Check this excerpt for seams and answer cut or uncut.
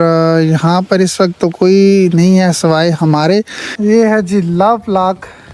cut